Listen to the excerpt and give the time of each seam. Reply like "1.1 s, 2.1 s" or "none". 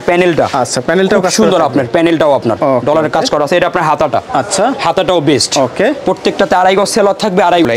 none